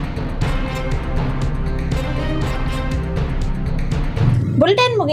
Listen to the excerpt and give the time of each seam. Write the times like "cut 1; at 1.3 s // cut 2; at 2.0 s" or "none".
none